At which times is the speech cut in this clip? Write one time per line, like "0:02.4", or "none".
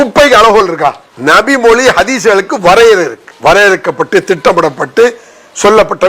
0:01.1
0:03.2